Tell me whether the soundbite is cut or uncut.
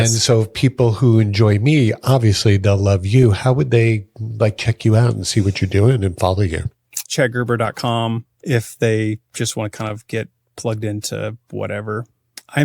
cut